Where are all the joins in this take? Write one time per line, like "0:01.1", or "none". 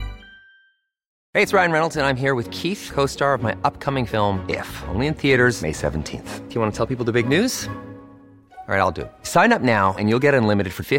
0:01.2